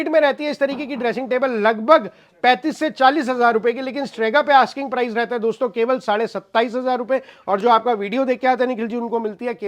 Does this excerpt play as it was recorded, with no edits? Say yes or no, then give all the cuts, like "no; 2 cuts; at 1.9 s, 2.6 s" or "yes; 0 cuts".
yes; 0 cuts